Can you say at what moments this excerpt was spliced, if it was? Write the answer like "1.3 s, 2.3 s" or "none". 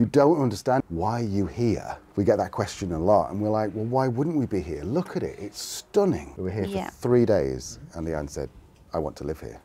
0.8 s, 2.0 s, 6.3 s